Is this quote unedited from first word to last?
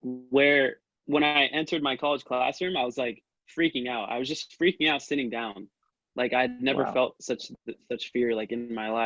yes; 0 cuts

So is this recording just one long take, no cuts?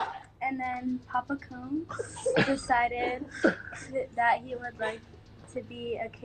no; 1 cut; at 2.6 s

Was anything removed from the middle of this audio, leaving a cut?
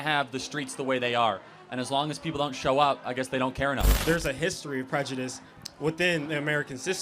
yes; 1 cut; at 3.9 s

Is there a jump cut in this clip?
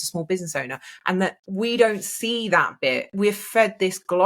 yes; 2 cuts; at 1.4 s, 3.1 s

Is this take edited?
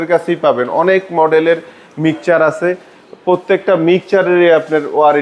no; 0 cuts

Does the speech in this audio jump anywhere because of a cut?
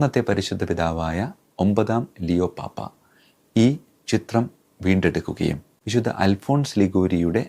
yes; 1 cut; at 5.4 s

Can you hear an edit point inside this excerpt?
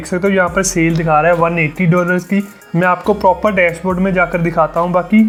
no; 0 cuts

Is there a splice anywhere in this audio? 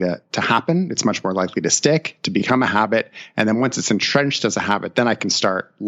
no; 0 cuts

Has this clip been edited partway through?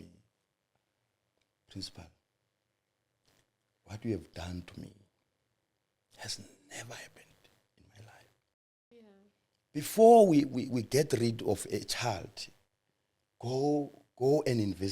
yes; 1 cut; at 8.9 s

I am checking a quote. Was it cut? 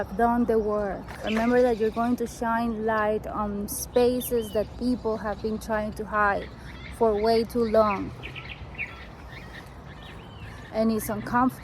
yes; 1 cut; at 1.1 s

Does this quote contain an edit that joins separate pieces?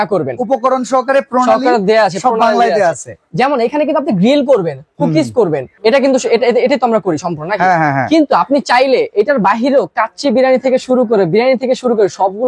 no; 0 cuts

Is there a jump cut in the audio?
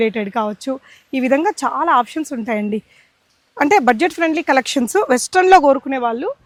no; 0 cuts

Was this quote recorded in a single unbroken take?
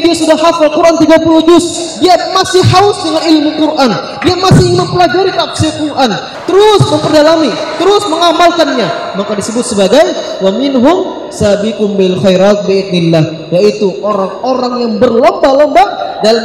no; 1 cut; at 6.3 s

